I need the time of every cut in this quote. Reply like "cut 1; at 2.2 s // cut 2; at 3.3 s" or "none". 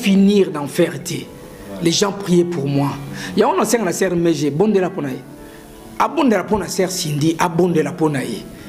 none